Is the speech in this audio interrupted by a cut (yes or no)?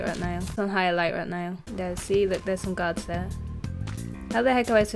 no